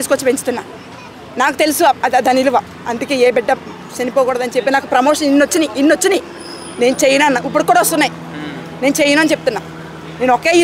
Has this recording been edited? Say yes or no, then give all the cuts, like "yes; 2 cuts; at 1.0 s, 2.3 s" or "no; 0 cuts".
no; 0 cuts